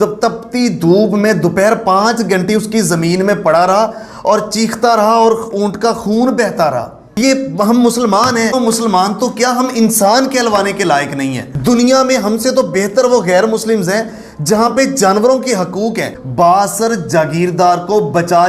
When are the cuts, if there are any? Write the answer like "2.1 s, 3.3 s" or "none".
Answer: 7.0 s, 8.5 s, 11.5 s, 16.1 s